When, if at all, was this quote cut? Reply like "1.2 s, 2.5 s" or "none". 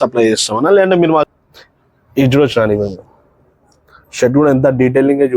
1.3 s